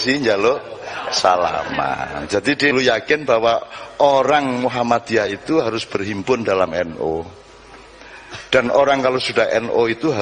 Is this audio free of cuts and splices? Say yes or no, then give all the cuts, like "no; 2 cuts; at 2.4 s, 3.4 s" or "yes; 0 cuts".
no; 1 cut; at 2.7 s